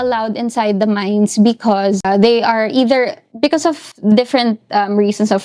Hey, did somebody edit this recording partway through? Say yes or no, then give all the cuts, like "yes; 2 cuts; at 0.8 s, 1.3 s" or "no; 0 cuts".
yes; 1 cut; at 2.0 s